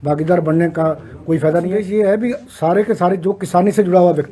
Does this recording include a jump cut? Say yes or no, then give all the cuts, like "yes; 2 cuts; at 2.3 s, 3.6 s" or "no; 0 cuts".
yes; 1 cut; at 1.8 s